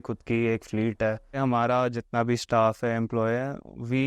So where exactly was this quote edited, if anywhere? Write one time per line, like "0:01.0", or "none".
0:01.3